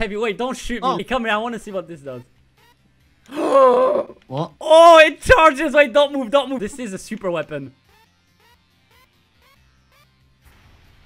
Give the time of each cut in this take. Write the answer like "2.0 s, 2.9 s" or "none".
1.0 s, 6.6 s